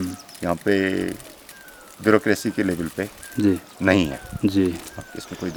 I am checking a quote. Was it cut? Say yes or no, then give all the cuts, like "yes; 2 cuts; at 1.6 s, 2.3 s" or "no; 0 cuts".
no; 0 cuts